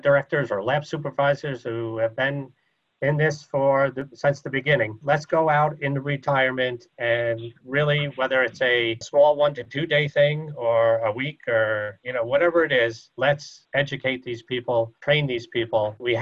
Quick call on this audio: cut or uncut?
uncut